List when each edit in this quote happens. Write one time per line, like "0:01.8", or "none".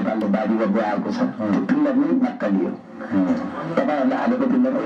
none